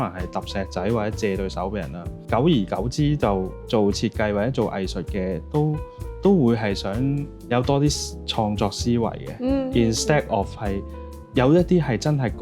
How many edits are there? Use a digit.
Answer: 3